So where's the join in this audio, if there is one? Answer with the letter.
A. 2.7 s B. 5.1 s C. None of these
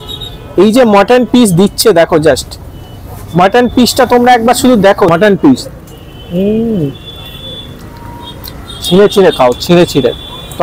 B